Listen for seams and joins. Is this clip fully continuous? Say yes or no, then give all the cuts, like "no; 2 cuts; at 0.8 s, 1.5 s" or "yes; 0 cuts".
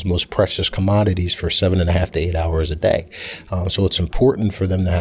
yes; 0 cuts